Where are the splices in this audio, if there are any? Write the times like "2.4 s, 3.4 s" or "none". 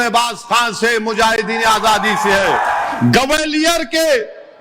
2.8 s